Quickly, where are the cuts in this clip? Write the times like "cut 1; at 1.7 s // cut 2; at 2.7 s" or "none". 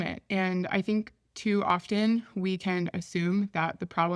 none